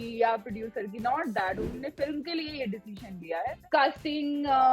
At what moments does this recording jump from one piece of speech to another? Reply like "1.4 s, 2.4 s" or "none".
3.6 s

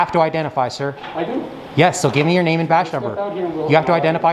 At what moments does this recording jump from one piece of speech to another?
none

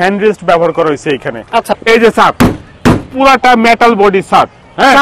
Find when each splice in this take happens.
1.7 s

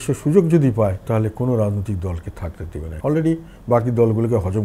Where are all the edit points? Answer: 1.0 s, 2.9 s

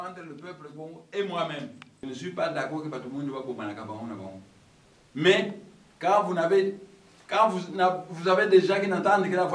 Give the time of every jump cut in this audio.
2.1 s

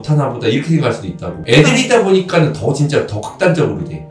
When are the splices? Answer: none

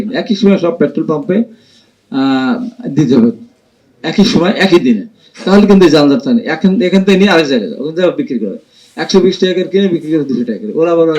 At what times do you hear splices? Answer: none

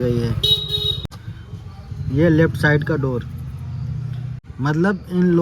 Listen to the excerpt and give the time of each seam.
1.0 s, 4.4 s

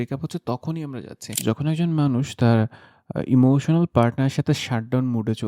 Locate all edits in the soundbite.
1.2 s

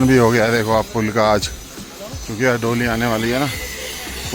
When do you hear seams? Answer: none

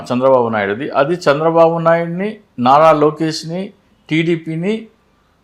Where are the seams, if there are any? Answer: none

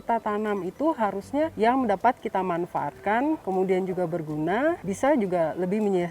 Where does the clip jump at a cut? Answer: 1.5 s, 3.4 s, 4.9 s

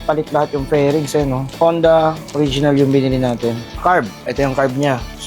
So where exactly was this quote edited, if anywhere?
1.5 s, 3.7 s

